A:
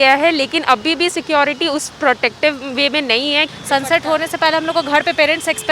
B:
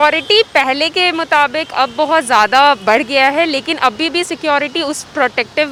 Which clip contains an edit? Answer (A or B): A